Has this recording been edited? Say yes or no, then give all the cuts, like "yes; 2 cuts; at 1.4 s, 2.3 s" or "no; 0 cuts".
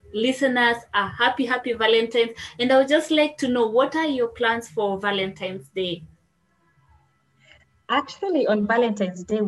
no; 0 cuts